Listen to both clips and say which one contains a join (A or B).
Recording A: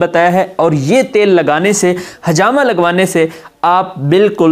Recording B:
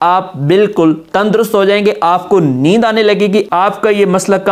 B